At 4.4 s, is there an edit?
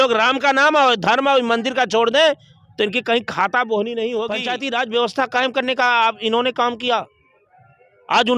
yes; 1 cut; at 4.4 s

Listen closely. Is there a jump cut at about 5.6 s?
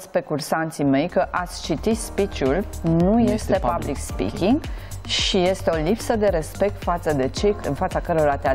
no; 1 cut; at 7.6 s

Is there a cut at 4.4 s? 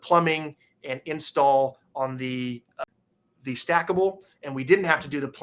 no; 1 cut; at 2.9 s

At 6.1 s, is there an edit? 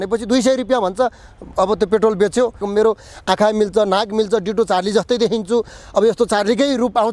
no; 1 cut; at 2.6 s

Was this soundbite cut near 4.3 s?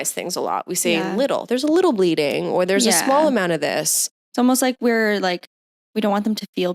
yes; 1 cut; at 4.3 s

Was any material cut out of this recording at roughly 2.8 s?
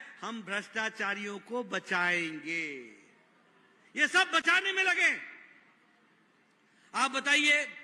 no; 0 cuts

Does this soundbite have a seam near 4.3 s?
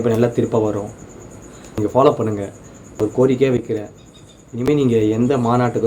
no; 2 cuts; at 1.8 s, 3.0 s

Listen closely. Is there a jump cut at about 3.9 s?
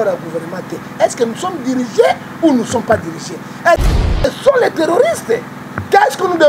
yes; 1 cut; at 3.9 s

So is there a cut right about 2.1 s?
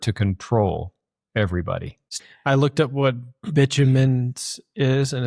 yes; 1 cut; at 2.1 s

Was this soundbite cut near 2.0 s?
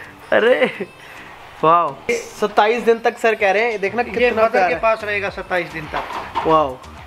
yes; 1 cut; at 2.0 s

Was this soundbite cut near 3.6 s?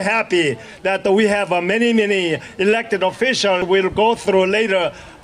yes; 1 cut; at 3.6 s

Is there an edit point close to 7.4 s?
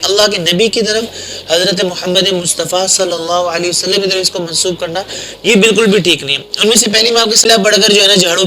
yes; 1 cut; at 7.4 s

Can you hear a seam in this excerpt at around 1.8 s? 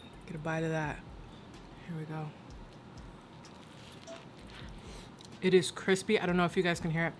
no; 1 cut; at 5.1 s

